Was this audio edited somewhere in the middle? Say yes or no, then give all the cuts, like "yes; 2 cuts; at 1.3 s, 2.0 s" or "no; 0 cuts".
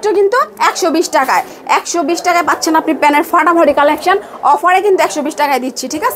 no; 0 cuts